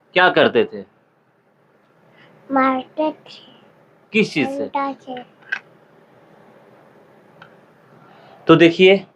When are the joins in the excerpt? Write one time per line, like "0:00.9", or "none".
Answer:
0:04.5